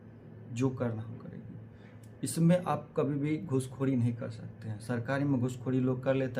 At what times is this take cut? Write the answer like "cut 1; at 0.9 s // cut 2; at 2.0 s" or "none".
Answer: none